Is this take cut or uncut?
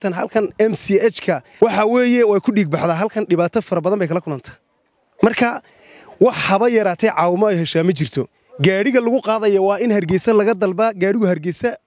cut